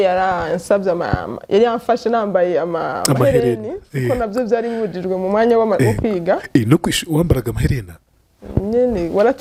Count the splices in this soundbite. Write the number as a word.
zero